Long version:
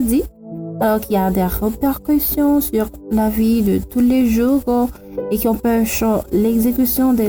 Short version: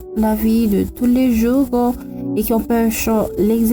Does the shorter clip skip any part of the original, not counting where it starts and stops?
no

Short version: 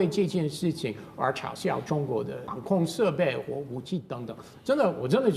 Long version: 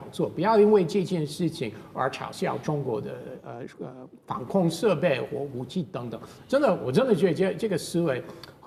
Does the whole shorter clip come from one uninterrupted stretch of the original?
no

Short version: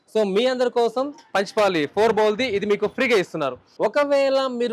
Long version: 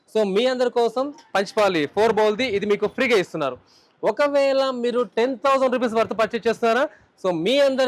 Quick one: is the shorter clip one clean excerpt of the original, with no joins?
no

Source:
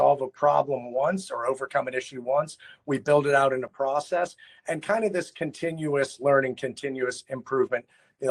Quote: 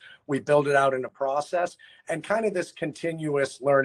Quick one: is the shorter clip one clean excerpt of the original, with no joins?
yes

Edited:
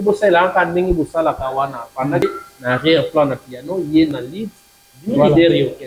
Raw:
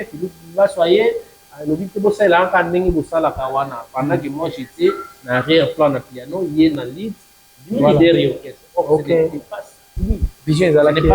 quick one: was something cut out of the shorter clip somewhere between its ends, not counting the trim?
yes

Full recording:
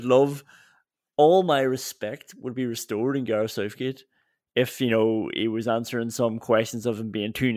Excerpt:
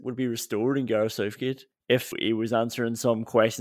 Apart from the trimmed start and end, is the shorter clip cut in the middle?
yes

